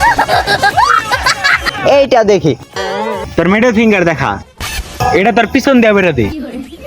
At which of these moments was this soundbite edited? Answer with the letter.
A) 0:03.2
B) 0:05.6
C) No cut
A